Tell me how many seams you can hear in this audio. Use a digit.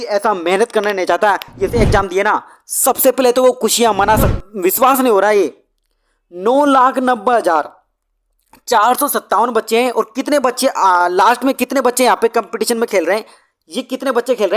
2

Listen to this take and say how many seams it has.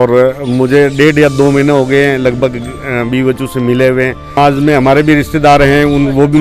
1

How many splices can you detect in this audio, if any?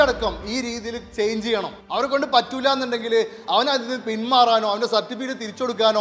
1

